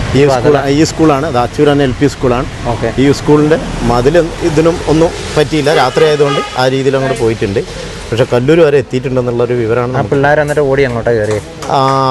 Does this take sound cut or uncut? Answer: uncut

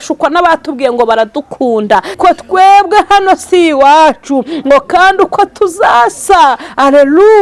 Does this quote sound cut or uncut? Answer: cut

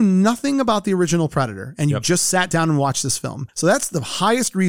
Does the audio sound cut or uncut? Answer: uncut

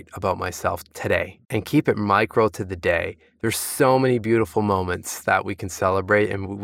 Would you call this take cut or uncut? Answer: cut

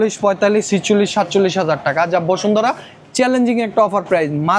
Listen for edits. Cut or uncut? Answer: uncut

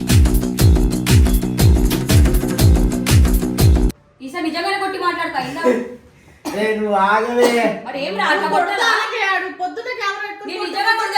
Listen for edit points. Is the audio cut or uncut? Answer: uncut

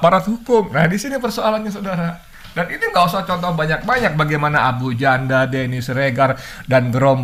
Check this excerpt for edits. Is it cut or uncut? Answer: uncut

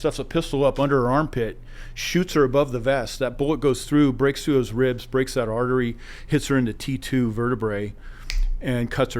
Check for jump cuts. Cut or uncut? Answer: uncut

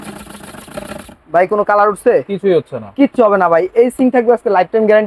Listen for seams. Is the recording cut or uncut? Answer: uncut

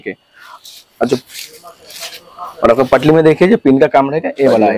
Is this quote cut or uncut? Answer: uncut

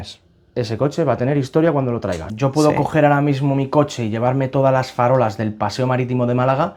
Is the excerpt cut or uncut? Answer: cut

